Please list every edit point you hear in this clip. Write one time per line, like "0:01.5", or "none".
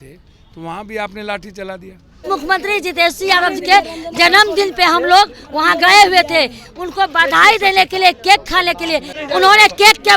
0:02.2
0:09.1